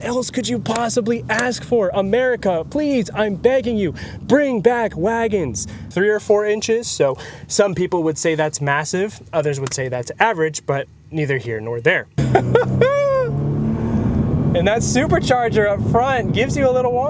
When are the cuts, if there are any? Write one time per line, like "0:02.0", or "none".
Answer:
0:05.8
0:12.2

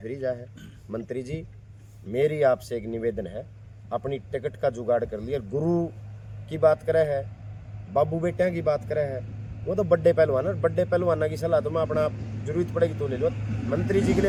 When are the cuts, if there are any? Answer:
none

